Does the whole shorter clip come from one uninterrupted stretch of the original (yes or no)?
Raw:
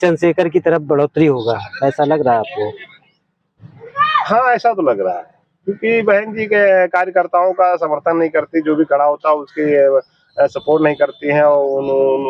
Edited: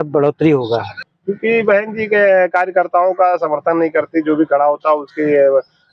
no